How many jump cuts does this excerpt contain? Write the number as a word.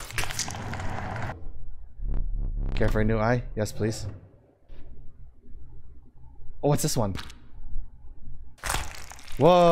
one